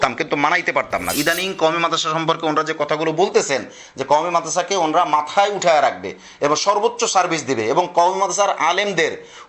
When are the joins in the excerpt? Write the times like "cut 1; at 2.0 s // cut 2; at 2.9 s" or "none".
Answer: cut 1; at 1.1 s